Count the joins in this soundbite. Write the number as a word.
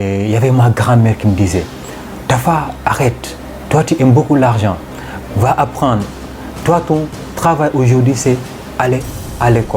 zero